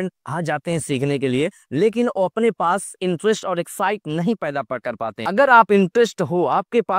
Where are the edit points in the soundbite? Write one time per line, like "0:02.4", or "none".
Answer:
0:05.2